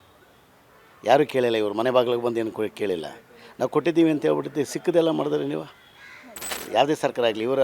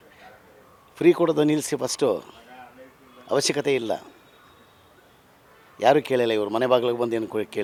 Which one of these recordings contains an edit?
first; 1 cut; at 6.6 s

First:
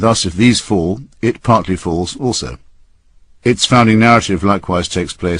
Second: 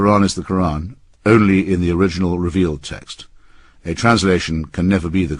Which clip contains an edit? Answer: first; 1 cut; at 3.3 s

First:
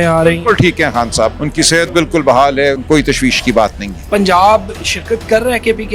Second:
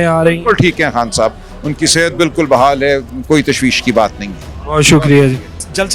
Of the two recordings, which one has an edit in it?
first; 3 cuts; at 1.4 s, 2.8 s, 3.9 s

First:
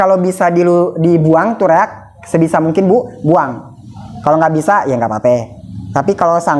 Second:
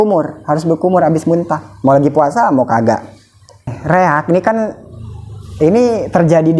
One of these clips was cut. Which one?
second; 1 cut; at 3.7 s

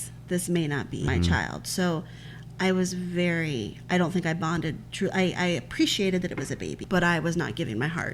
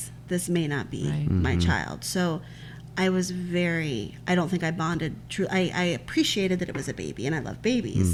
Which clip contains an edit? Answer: first; 2 cuts; at 1.1 s, 6.7 s

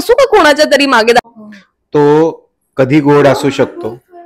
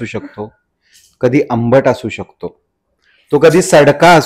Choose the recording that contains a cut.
first; 1 cut; at 1.2 s

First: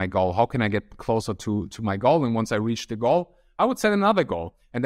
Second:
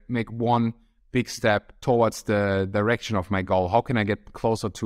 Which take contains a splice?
second; 1 cut; at 1.7 s

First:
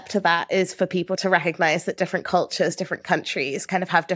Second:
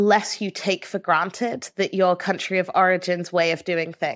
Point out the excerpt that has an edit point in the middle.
first; 1 cut; at 1.2 s

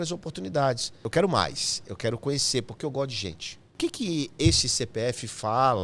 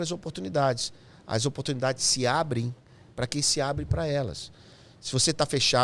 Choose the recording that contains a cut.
first; 2 cuts; at 1.1 s, 3.8 s

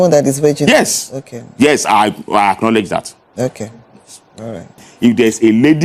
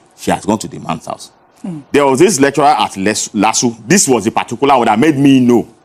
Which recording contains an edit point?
first; 1 cut; at 4.9 s

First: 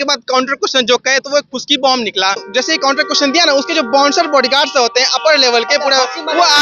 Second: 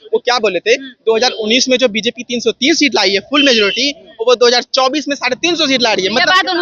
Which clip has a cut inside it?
first; 1 cut; at 2.4 s

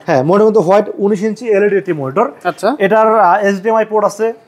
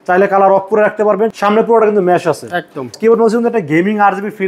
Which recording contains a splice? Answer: second; 2 cuts; at 1.3 s, 2.9 s

